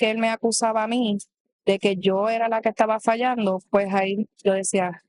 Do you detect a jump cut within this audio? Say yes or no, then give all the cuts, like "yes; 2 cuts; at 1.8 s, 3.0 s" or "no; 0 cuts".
no; 0 cuts